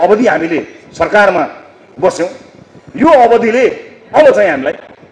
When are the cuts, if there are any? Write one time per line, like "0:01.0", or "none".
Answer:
none